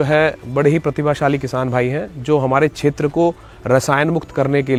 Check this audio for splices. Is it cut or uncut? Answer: uncut